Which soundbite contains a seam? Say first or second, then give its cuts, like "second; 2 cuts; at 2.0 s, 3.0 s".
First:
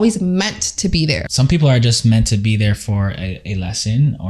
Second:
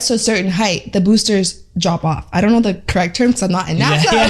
first; 1 cut; at 1.2 s